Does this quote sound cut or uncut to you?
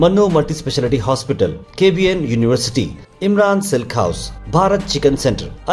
uncut